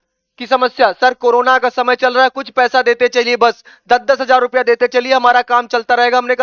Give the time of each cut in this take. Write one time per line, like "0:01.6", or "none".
none